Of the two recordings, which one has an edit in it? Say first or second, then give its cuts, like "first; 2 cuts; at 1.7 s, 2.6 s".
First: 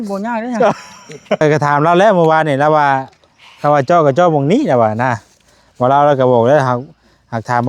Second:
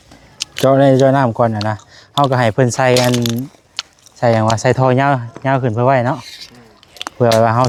first; 1 cut; at 1.4 s